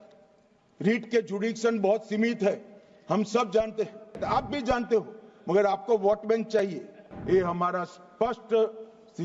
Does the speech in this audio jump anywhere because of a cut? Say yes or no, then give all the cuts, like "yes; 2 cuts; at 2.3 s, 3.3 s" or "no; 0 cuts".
yes; 2 cuts; at 4.2 s, 7.1 s